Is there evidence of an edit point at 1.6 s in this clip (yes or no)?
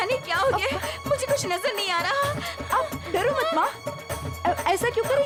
no